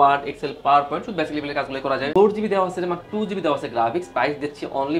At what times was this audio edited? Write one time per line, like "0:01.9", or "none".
0:02.1